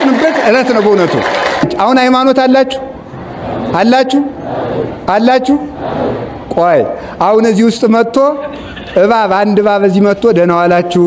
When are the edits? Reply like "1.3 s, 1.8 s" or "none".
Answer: 1.7 s